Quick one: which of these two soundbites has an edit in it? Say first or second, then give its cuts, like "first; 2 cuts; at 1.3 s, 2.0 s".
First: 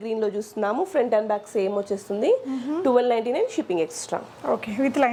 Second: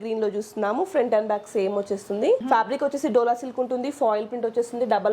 second; 1 cut; at 2.4 s